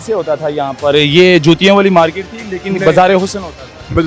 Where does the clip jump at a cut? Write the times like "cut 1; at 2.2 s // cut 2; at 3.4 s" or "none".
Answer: none